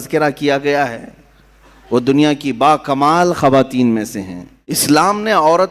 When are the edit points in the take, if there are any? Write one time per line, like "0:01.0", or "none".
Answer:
0:04.8